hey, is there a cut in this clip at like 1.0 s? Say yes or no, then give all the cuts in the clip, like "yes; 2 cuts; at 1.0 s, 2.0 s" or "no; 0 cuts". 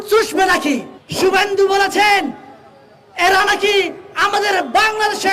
yes; 1 cut; at 1.0 s